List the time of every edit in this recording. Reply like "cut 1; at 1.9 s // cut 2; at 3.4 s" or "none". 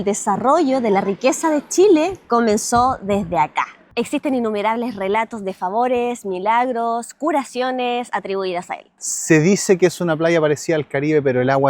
cut 1; at 3.8 s // cut 2; at 8.9 s